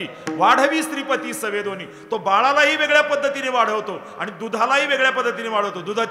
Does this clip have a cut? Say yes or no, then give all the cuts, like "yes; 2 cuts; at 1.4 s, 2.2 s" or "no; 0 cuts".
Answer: no; 0 cuts